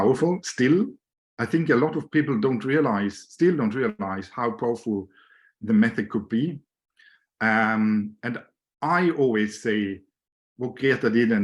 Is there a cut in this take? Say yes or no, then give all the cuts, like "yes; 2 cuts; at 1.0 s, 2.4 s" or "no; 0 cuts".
no; 0 cuts